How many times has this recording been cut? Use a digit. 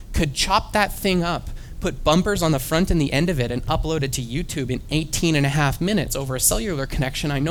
0